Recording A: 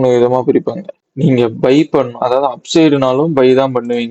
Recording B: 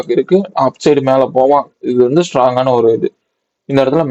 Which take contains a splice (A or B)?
A